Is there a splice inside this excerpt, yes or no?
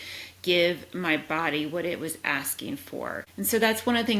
yes